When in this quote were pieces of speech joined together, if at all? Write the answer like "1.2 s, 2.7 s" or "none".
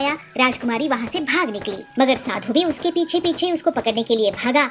none